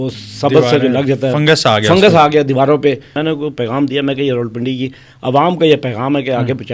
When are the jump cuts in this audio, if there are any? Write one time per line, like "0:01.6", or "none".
0:03.1